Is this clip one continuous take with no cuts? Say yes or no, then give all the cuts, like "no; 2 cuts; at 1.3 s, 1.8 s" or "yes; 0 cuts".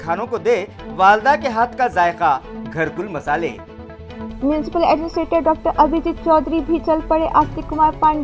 yes; 0 cuts